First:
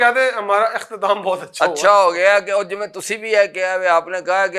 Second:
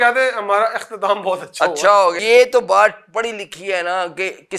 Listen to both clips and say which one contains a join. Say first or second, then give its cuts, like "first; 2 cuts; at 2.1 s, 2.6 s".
second; 1 cut; at 2.2 s